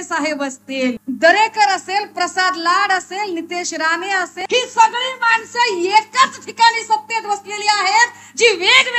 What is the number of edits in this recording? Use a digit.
2